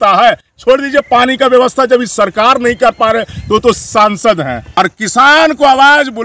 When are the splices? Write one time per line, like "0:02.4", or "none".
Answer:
0:04.6

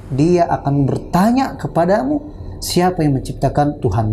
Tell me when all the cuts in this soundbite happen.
none

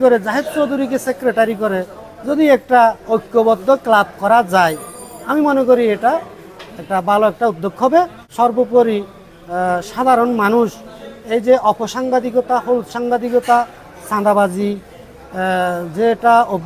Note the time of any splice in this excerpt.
0:08.2

